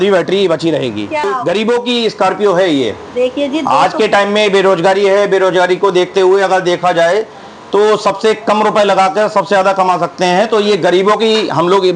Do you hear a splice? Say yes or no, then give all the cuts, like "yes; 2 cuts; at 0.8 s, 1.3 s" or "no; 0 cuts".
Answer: yes; 1 cut; at 1.2 s